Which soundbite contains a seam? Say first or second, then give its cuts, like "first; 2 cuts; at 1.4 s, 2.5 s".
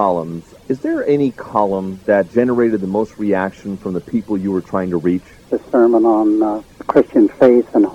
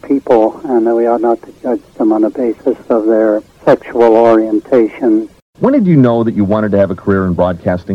second; 1 cut; at 5.3 s